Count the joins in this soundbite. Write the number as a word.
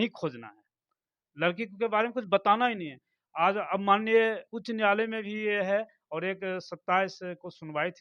zero